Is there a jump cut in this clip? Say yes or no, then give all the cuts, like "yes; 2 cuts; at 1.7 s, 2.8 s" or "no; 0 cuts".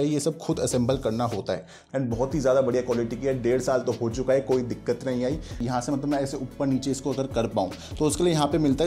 yes; 2 cuts; at 1.8 s, 5.6 s